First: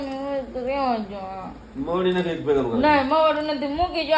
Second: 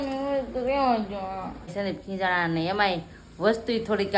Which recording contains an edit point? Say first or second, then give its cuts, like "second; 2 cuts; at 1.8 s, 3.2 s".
second; 1 cut; at 1.6 s